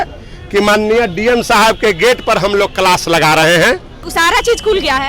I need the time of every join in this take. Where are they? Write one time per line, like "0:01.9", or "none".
0:04.0